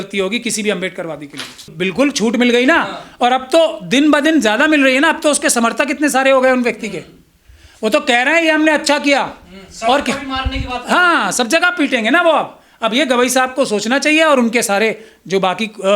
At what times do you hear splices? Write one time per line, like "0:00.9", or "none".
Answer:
0:01.7